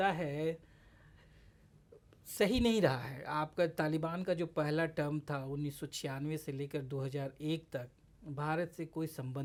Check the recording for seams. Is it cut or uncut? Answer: uncut